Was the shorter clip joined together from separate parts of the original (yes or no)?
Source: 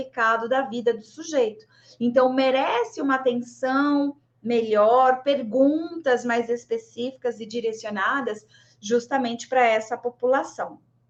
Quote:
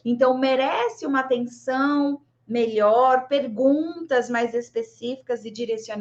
no